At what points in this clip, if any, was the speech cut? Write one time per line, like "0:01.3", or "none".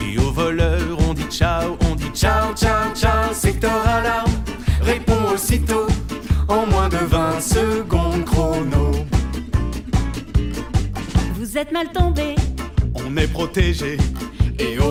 none